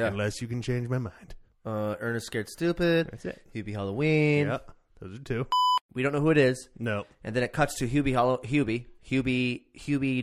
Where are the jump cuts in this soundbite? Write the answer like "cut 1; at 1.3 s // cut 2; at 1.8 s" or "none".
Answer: cut 1; at 5.8 s